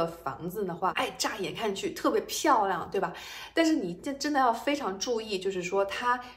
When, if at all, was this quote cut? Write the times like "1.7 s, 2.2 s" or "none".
0.9 s